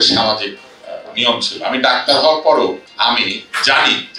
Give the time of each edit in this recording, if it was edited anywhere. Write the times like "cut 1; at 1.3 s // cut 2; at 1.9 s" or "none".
cut 1; at 2.9 s